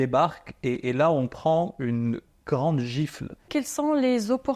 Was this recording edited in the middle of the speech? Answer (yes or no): yes